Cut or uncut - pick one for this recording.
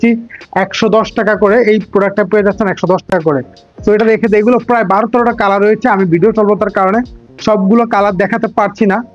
uncut